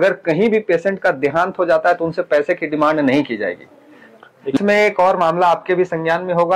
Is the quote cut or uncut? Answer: cut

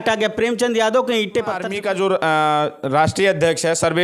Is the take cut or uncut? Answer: cut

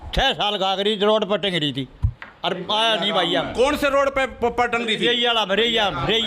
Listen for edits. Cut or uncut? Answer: uncut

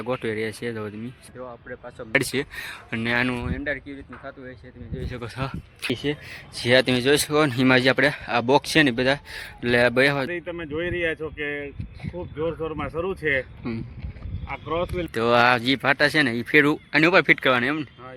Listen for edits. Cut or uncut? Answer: cut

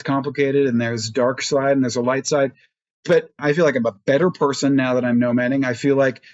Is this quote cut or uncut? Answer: cut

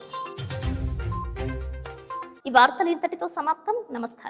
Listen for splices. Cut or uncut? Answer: uncut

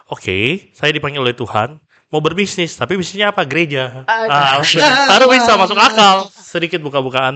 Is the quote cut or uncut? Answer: cut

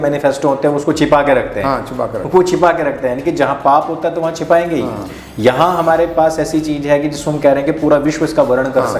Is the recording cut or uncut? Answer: uncut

